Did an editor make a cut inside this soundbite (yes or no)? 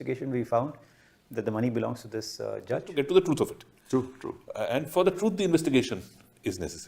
yes